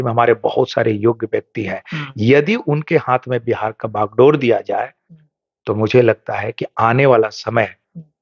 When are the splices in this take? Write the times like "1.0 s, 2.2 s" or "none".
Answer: none